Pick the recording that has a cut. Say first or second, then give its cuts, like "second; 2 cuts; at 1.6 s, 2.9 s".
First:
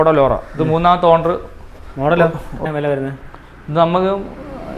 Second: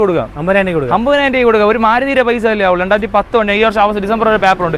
first; 1 cut; at 2.6 s